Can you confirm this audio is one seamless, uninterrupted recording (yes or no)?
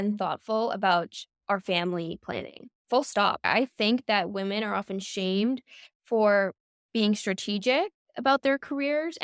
yes